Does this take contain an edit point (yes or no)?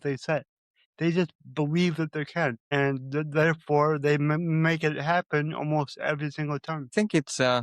yes